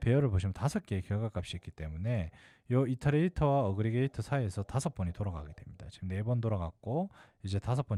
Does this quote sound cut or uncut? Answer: uncut